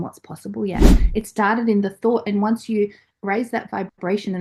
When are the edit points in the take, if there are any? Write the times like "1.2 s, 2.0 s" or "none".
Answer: 1.0 s